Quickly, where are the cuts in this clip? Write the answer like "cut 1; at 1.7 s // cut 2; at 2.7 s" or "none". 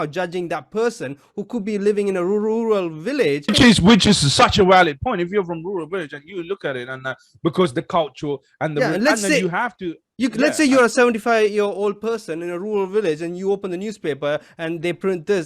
cut 1; at 3.5 s